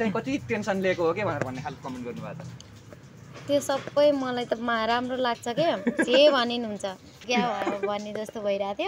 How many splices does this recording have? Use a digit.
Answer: 1